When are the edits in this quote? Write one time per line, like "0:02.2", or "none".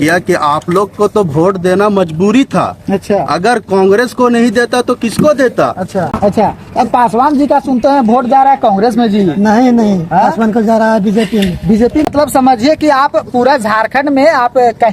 0:06.1
0:12.1

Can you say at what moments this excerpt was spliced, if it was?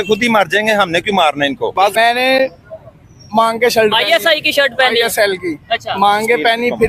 0:01.8

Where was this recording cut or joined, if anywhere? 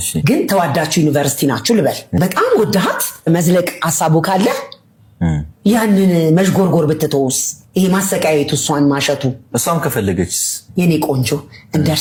none

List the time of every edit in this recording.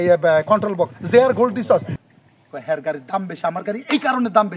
0:02.0

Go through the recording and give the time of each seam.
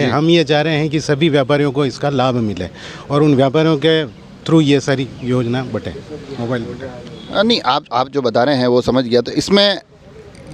none

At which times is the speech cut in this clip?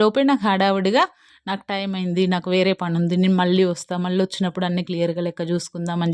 none

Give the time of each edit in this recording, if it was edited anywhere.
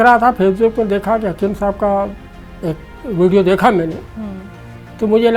none

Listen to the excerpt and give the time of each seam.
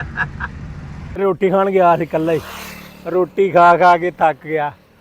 0:01.2

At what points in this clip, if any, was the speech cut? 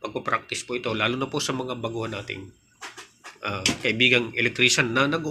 none

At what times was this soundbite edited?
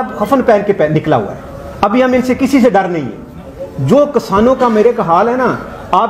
none

